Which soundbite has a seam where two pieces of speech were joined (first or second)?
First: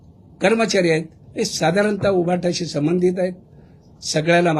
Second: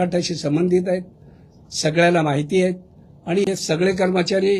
second